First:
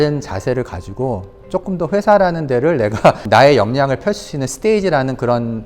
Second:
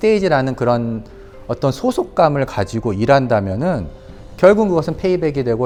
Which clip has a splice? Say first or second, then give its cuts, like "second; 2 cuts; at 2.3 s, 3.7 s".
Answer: first; 1 cut; at 3.2 s